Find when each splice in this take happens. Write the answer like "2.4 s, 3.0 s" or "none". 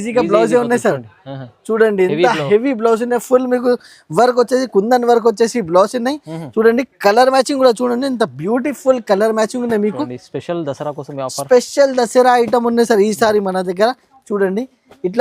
none